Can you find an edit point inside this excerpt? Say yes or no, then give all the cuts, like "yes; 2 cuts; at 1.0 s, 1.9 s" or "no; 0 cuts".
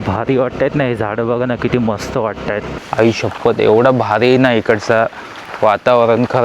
yes; 1 cut; at 2.7 s